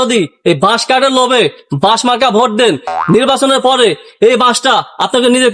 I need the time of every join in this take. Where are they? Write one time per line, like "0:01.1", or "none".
none